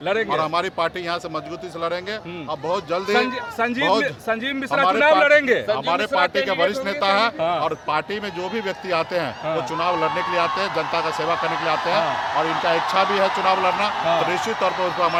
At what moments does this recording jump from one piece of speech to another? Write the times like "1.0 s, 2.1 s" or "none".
none

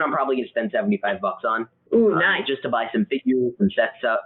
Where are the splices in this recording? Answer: none

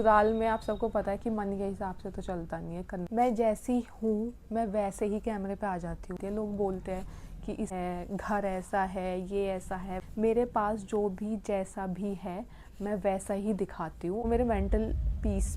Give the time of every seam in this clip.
3.1 s, 6.2 s, 7.7 s, 10.0 s, 14.3 s

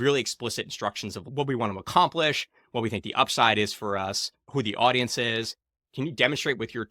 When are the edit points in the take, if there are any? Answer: 1.3 s, 4.5 s, 5.8 s

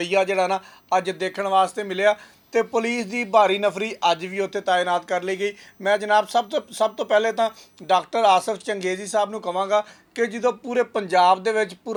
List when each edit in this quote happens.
none

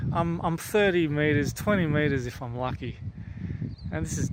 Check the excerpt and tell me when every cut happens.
none

